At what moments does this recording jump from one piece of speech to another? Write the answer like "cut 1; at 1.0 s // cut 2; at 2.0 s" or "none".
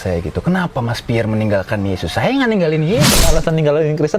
cut 1; at 3.3 s